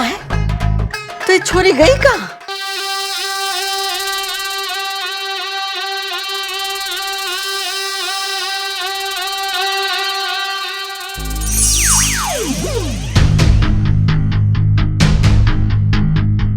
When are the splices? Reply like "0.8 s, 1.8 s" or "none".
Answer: 2.4 s